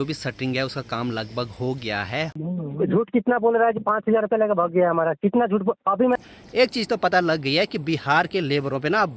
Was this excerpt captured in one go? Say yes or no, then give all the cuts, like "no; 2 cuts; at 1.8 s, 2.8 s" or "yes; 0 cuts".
no; 2 cuts; at 2.4 s, 6.2 s